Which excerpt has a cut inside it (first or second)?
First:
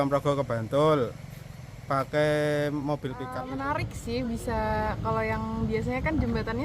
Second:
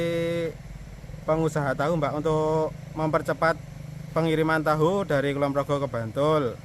first